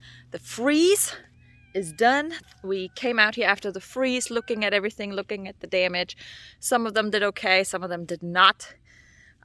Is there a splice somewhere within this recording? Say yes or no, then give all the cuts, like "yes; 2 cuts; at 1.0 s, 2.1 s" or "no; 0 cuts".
yes; 1 cut; at 2.4 s